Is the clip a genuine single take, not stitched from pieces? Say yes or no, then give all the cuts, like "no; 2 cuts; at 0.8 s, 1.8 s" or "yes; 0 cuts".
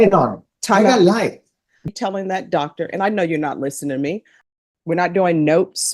no; 2 cuts; at 1.8 s, 4.3 s